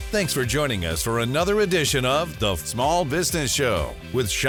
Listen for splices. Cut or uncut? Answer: uncut